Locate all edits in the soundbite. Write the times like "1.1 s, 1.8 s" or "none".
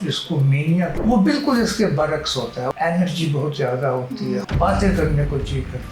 0.9 s, 2.7 s, 4.5 s